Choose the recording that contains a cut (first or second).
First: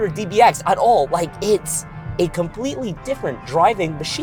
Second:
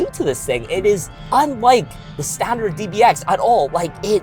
second